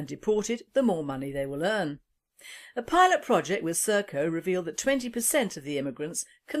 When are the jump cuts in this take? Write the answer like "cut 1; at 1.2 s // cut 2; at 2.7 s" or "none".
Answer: cut 1; at 1.5 s

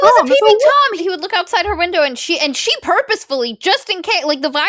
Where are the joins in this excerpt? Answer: cut 1; at 1.0 s

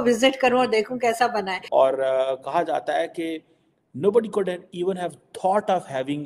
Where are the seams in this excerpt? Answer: cut 1; at 1.6 s

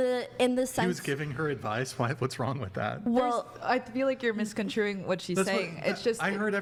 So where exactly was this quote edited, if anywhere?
none

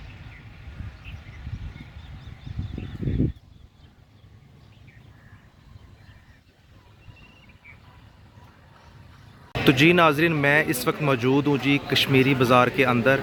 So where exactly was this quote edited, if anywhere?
none

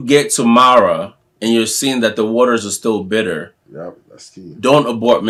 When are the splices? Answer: none

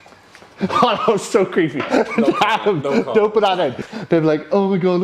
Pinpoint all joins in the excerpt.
cut 1; at 3.7 s

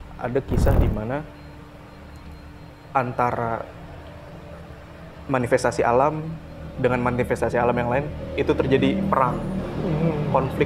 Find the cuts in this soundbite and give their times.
none

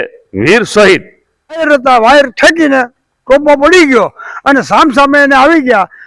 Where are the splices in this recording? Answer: cut 1; at 1.6 s

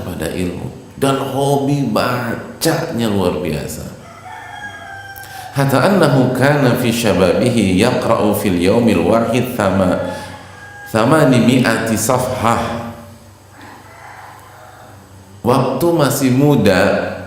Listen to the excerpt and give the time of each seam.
none

